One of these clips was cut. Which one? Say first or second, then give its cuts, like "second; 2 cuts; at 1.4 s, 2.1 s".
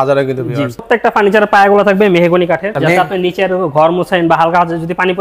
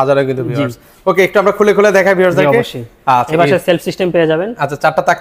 first; 2 cuts; at 0.8 s, 2.7 s